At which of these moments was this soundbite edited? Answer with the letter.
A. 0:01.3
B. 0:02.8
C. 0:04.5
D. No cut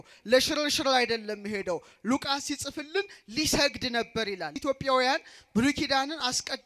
C